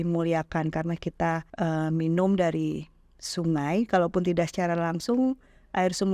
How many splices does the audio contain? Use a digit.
1